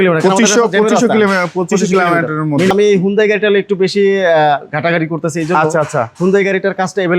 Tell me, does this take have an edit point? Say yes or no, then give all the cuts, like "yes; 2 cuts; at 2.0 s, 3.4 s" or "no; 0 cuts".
yes; 1 cut; at 2.7 s